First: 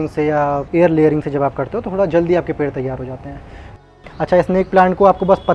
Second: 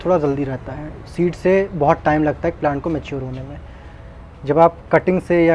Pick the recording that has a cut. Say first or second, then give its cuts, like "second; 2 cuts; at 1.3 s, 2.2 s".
first; 1 cut; at 3.8 s